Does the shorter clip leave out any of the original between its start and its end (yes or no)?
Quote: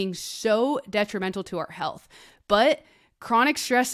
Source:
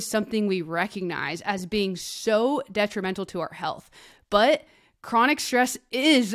no